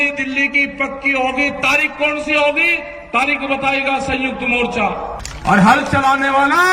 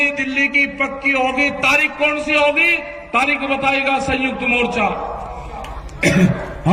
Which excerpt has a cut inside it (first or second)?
first